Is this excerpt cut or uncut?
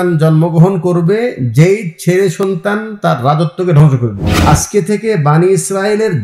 cut